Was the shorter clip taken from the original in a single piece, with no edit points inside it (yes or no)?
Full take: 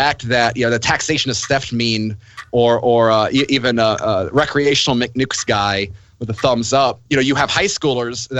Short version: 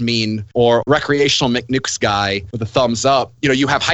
no